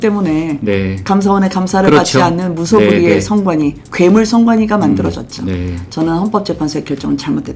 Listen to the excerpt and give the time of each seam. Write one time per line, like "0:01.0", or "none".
none